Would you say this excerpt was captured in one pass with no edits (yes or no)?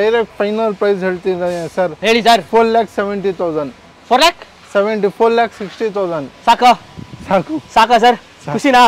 yes